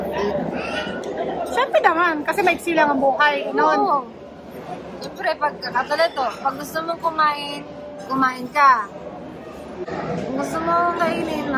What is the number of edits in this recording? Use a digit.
0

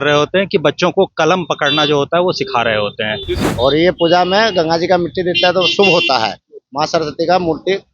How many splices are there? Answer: 1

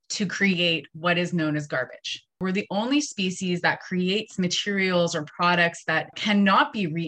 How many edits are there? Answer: 2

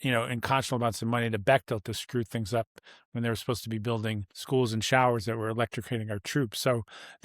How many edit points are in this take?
1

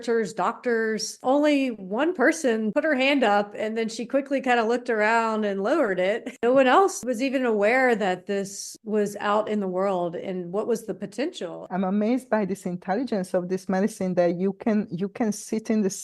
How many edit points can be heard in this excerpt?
5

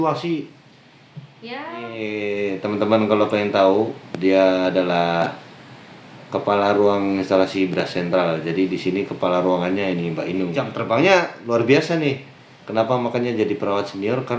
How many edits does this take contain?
2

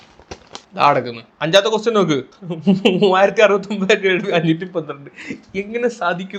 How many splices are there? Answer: 1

